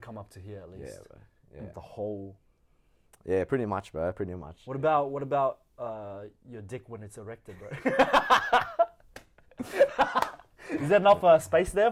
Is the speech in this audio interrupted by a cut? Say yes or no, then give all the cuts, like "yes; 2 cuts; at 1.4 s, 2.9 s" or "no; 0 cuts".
no; 0 cuts